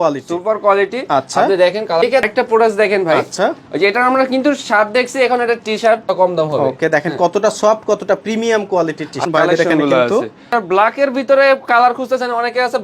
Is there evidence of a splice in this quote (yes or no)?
yes